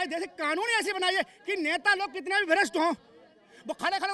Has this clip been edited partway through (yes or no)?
no